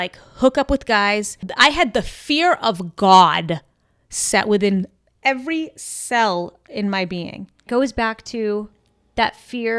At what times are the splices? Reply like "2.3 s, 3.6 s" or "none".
1.4 s, 7.6 s